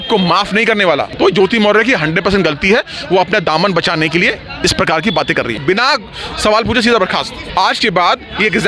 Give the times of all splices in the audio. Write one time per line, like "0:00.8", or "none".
0:01.1
0:05.6
0:07.4